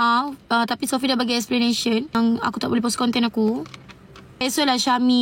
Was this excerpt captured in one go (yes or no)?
no